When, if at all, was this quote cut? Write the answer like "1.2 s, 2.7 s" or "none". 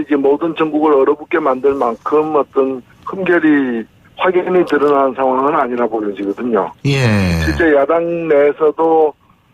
4.5 s